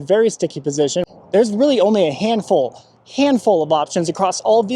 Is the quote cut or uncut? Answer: cut